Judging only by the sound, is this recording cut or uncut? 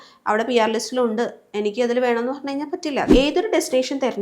cut